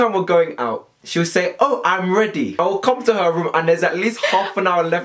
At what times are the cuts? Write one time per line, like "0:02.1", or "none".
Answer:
0:02.6